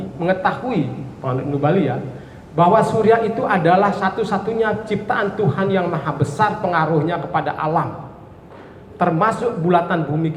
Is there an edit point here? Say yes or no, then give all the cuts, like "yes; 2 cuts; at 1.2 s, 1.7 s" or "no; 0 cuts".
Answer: no; 0 cuts